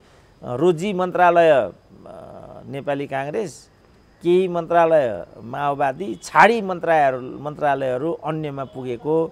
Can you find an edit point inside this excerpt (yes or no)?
no